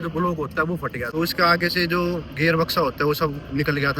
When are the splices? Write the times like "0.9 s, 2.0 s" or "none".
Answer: 1.1 s